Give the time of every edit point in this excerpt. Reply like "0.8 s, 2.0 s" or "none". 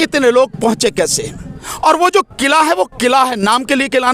1.6 s